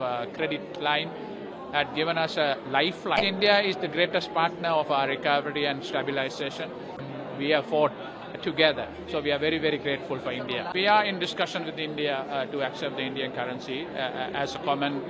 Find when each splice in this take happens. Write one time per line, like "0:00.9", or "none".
0:03.2
0:07.1
0:10.7